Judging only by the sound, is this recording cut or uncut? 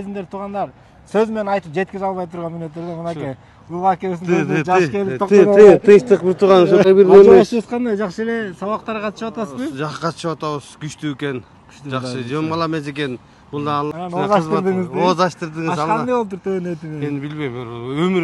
cut